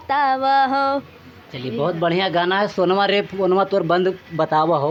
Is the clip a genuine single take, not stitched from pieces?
yes; 0 cuts

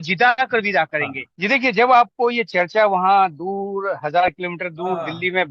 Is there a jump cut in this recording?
yes; 1 cut; at 1.2 s

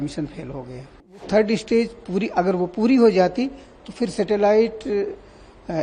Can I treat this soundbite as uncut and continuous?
no; 1 cut; at 1.2 s

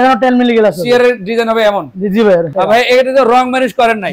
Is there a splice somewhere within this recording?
yes; 1 cut; at 2.5 s

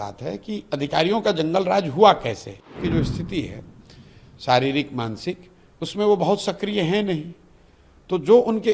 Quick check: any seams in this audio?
yes; 1 cut; at 2.8 s

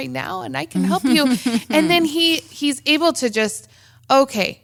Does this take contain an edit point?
no; 0 cuts

